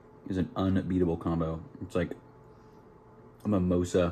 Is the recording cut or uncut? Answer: uncut